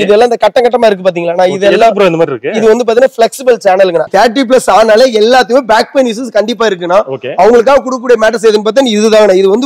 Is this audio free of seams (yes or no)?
no